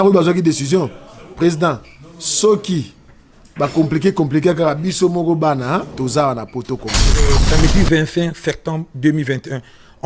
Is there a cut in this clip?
yes; 1 cut; at 7.3 s

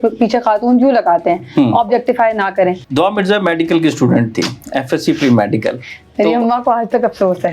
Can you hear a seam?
yes; 1 cut; at 2.8 s

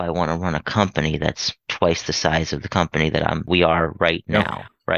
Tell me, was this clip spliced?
yes; 1 cut; at 3.5 s

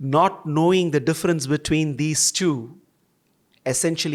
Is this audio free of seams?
yes; 0 cuts

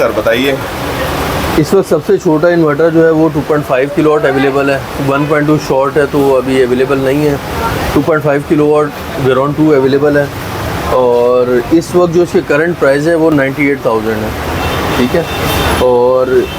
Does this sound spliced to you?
no; 0 cuts

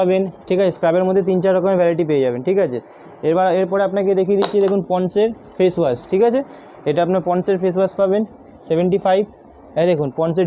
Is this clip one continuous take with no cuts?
yes; 0 cuts

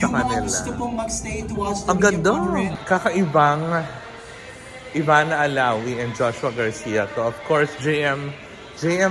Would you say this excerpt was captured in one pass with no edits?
no; 1 cut; at 2.8 s

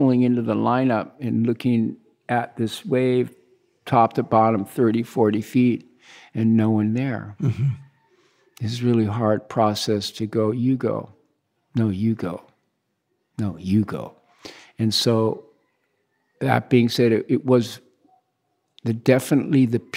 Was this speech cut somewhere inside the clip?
no; 0 cuts

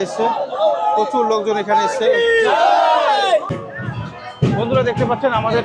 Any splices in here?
yes; 1 cut; at 3.5 s

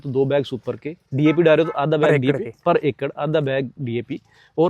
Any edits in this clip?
no; 0 cuts

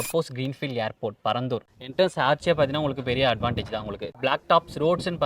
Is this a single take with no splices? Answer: no; 2 cuts; at 1.7 s, 4.1 s

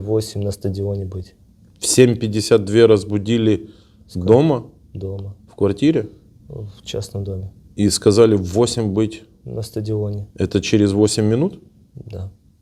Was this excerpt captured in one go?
yes; 0 cuts

